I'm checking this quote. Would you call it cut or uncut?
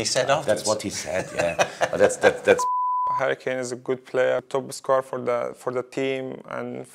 cut